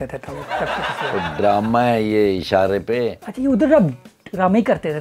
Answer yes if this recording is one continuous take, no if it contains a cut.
no